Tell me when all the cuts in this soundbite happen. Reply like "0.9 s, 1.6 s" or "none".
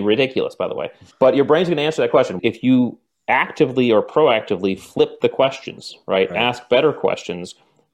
2.3 s